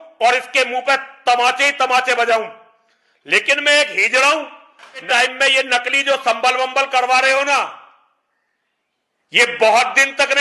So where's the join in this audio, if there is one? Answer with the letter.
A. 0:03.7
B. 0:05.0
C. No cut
B